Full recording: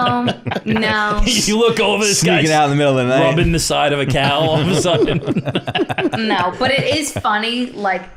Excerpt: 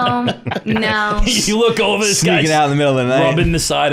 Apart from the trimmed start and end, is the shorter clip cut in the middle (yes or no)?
no